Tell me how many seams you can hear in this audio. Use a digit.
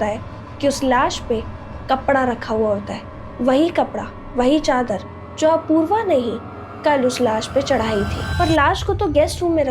1